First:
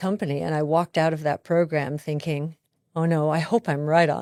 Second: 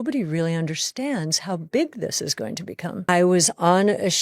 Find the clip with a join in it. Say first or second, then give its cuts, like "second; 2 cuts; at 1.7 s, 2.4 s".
second; 1 cut; at 3.0 s